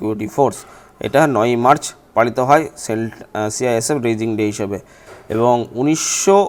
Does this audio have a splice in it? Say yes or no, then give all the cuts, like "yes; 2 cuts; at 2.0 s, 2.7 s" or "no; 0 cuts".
no; 0 cuts